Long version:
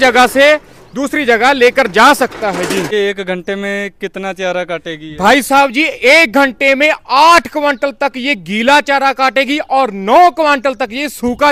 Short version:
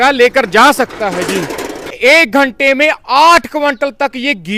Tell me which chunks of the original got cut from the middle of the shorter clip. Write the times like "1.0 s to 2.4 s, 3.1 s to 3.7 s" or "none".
3.3 s to 5.8 s

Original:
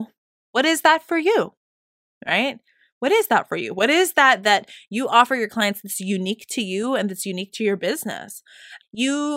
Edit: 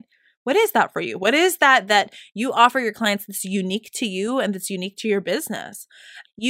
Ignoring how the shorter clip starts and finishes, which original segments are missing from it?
none

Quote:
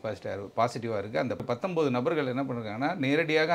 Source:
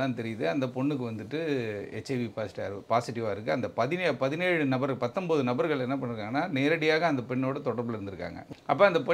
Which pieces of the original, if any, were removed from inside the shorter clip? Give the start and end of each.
3.7 s to 4.9 s

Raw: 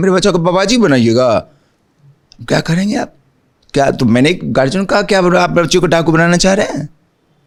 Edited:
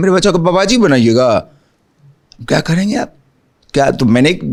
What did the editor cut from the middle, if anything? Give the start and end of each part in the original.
none

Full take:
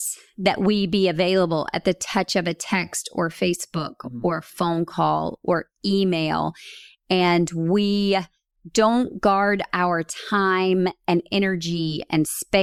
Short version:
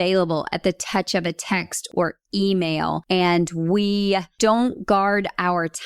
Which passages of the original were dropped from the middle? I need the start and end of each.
3.1 s to 5.4 s, 6.5 s to 7.0 s, 8.3 s to 8.6 s

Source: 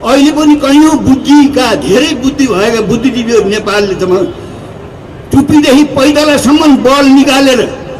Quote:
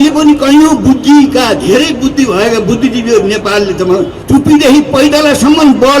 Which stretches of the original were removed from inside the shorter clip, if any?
4.4 s to 5.2 s

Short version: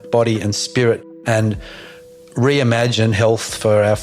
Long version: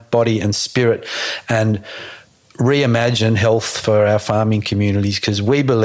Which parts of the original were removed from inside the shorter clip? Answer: 1.1 s to 1.3 s

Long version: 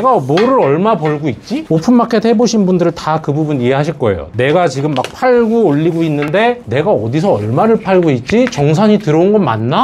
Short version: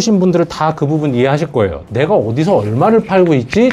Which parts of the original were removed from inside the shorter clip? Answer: 4.3 s to 6.6 s

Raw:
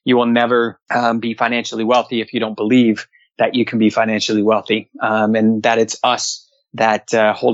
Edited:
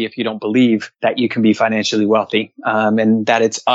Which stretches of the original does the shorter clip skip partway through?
3.1 s to 3.3 s

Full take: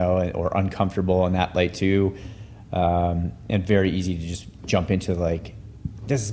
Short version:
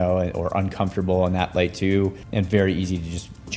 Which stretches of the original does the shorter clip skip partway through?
2.2 s to 3.4 s

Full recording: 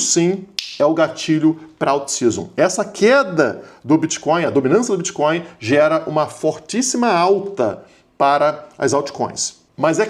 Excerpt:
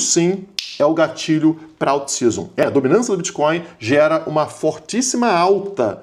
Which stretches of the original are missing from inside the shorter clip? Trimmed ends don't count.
2.6 s to 4.4 s

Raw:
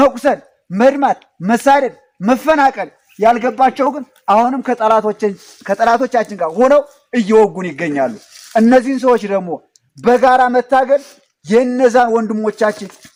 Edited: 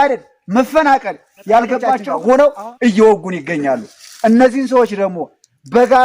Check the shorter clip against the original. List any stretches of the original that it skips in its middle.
3.8 s to 6.4 s

